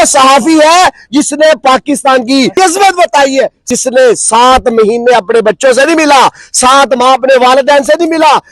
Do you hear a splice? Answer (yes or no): yes